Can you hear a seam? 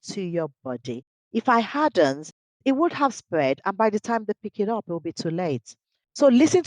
yes; 1 cut; at 2.5 s

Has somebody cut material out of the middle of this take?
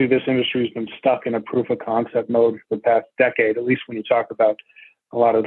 no; 0 cuts

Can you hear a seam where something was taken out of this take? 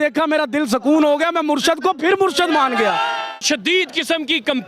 yes; 1 cut; at 3.4 s

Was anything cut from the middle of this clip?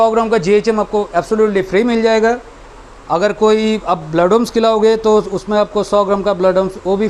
no; 0 cuts

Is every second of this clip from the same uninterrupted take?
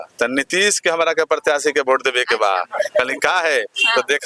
yes; 0 cuts

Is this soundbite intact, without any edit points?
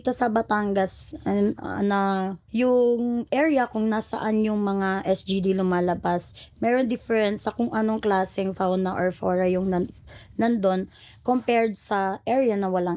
no; 1 cut; at 2.4 s

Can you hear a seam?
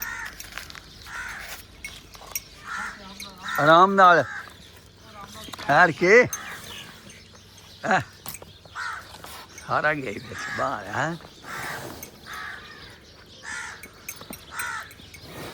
no; 0 cuts

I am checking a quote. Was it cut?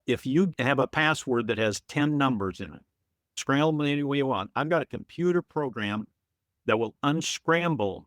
yes; 1 cut; at 3.4 s

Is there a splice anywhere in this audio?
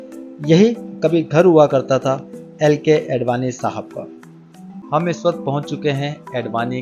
yes; 1 cut; at 4.8 s

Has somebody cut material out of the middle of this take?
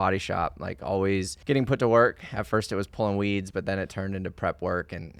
yes; 1 cut; at 1.3 s

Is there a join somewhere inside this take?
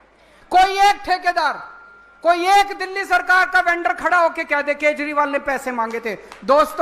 no; 0 cuts

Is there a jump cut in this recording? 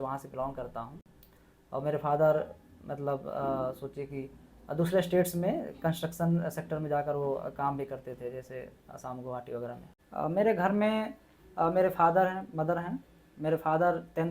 yes; 1 cut; at 9.9 s

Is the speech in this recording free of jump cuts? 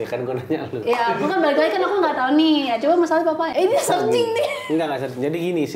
yes; 0 cuts

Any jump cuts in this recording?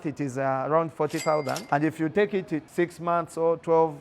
yes; 2 cuts; at 1.6 s, 2.7 s

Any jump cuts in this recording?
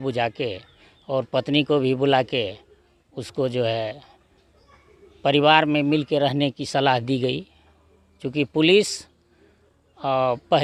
no; 0 cuts

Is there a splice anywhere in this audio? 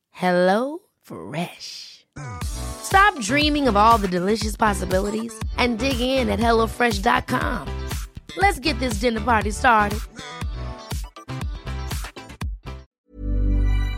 yes; 1 cut; at 12.9 s

